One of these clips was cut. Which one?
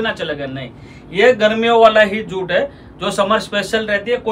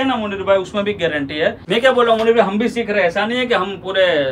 second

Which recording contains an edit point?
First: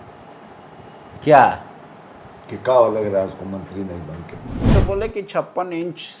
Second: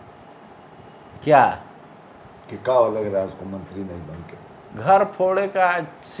first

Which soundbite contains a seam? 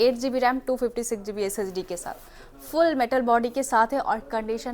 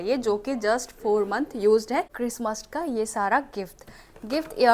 second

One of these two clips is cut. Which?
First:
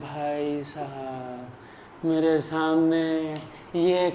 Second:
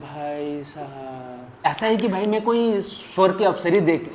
second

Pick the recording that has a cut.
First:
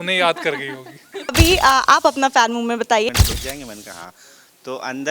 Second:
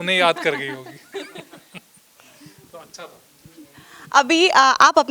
first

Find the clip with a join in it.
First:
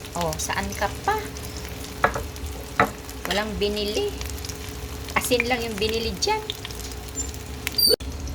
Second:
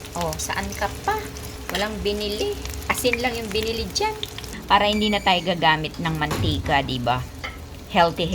second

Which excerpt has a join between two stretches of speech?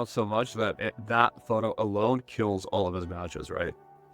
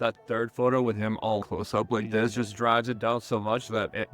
second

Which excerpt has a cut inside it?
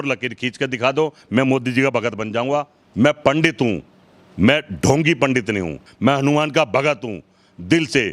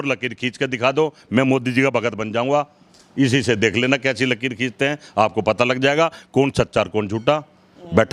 first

